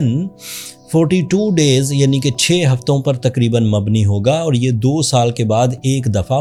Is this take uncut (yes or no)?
yes